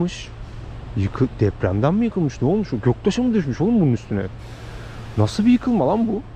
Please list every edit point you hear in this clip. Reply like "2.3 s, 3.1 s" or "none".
none